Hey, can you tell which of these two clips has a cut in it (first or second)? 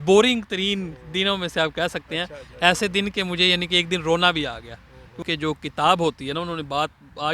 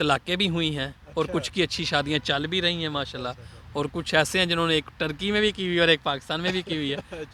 first